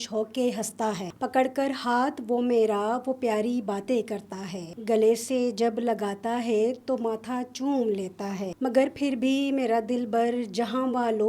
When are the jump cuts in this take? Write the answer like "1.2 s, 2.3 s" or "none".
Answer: 1.1 s, 4.7 s, 8.5 s